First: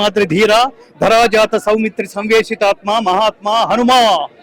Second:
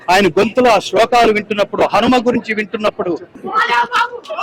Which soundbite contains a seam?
second; 1 cut; at 3.4 s

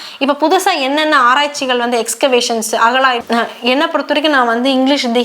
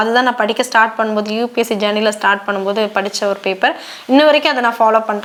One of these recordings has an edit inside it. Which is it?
first; 1 cut; at 3.2 s

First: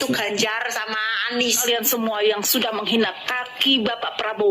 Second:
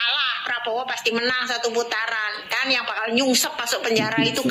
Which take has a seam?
first; 1 cut; at 1.6 s

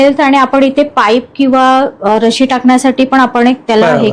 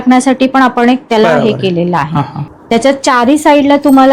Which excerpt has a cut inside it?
second; 1 cut; at 2.5 s

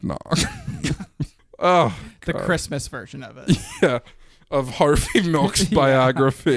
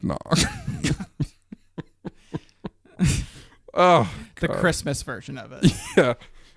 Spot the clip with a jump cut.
first; 1 cut; at 1.4 s

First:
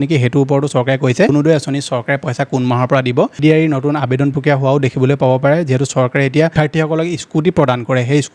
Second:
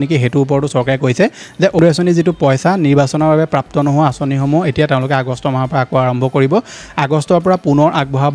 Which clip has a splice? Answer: first; 3 cuts; at 1.3 s, 3.4 s, 6.5 s

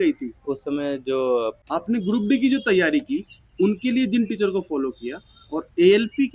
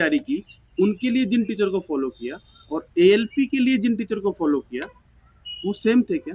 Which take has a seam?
first; 1 cut; at 1.6 s

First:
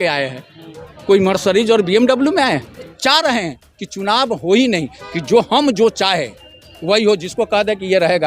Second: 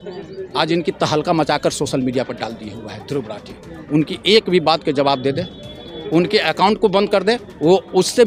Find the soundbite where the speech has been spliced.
first; 1 cut; at 2.9 s

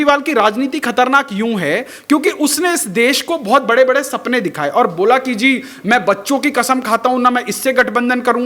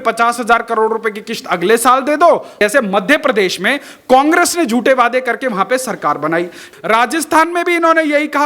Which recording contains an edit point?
second; 2 cuts; at 2.6 s, 6.7 s

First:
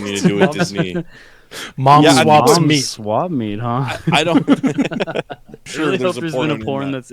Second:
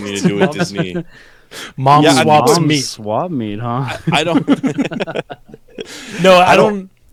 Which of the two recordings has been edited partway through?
first; 1 cut; at 5.7 s

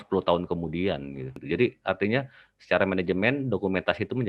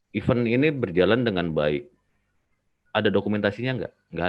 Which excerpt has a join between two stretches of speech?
first; 1 cut; at 1.4 s

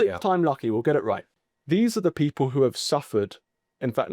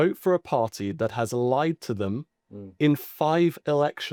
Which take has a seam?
first; 1 cut; at 1.3 s

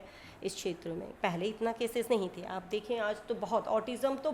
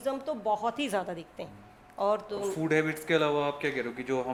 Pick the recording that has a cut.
first; 1 cut; at 1.1 s

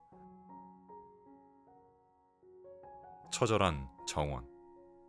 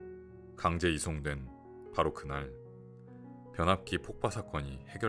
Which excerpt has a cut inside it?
first; 2 cuts; at 3.4 s, 4.4 s

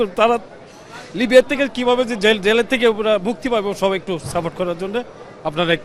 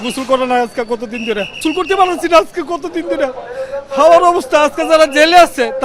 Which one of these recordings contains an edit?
second; 1 cut; at 1.5 s

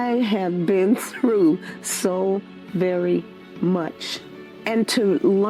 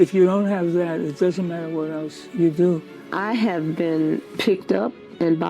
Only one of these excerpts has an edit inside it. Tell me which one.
second; 3 cuts; at 2.2 s, 3.0 s, 4.3 s

